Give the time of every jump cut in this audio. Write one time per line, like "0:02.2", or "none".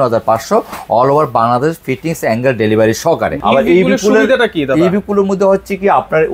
0:03.4